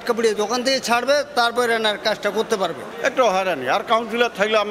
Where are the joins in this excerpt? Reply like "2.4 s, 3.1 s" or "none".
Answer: 2.9 s